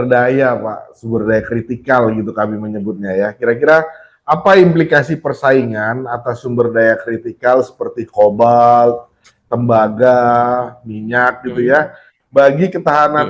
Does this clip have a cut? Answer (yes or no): no